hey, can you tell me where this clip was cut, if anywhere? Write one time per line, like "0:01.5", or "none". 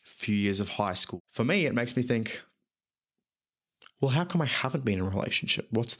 0:01.2